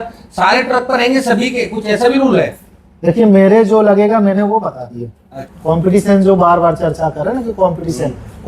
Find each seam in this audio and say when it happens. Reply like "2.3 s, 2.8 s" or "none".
5.5 s

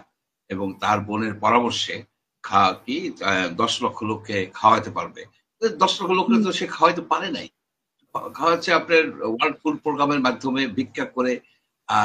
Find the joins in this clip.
none

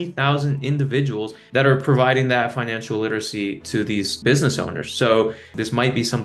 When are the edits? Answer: 1.5 s, 5.4 s

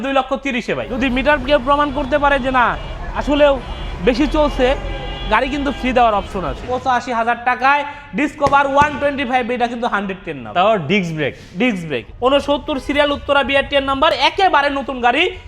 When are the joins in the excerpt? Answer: 0.9 s, 6.6 s, 12.0 s

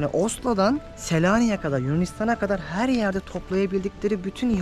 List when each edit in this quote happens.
0.9 s

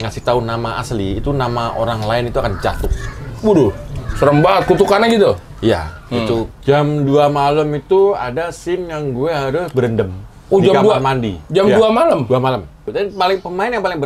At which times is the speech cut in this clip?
3.1 s, 6.5 s, 12.9 s

